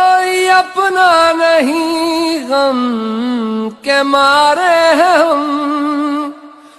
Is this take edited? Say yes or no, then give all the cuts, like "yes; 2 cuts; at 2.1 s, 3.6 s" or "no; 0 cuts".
no; 0 cuts